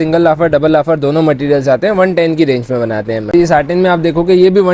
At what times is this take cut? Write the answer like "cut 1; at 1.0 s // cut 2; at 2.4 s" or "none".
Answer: cut 1; at 3.2 s